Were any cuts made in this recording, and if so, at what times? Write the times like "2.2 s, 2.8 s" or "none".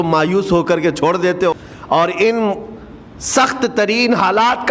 1.7 s